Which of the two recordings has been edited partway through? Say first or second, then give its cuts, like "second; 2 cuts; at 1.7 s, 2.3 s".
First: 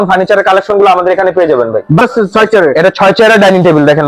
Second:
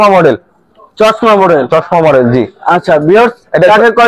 first; 1 cut; at 2.0 s